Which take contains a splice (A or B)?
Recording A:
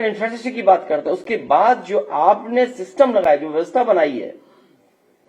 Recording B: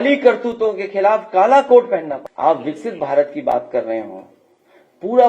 B